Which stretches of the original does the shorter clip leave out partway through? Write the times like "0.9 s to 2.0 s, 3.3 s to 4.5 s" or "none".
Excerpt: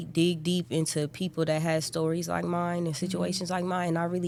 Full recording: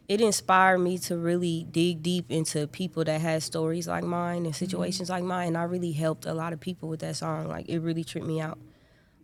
none